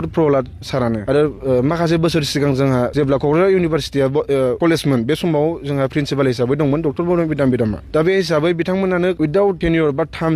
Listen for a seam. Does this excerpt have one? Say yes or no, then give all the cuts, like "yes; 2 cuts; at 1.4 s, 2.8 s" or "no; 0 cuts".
yes; 5 cuts; at 1.0 s, 2.9 s, 4.6 s, 7.8 s, 9.4 s